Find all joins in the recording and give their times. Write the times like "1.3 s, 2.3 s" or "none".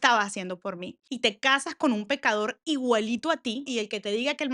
1.0 s, 3.7 s